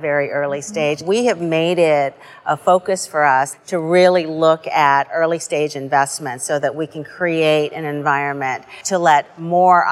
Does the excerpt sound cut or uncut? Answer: cut